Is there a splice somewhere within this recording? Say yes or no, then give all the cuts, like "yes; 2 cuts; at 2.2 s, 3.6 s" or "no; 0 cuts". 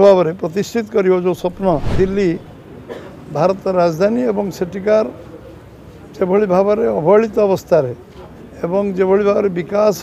yes; 1 cut; at 1.9 s